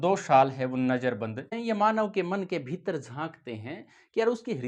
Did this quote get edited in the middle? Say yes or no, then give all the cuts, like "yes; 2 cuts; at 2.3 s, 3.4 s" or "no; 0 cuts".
yes; 1 cut; at 1.5 s